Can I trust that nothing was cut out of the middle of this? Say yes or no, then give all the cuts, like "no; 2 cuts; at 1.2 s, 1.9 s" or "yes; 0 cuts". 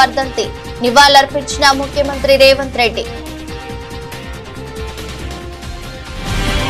yes; 0 cuts